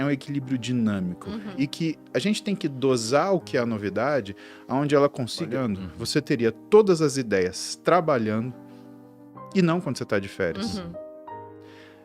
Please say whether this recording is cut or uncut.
cut